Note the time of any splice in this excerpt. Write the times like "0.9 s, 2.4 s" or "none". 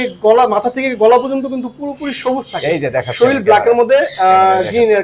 none